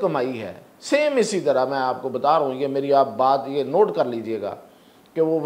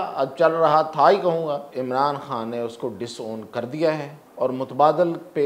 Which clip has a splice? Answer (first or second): second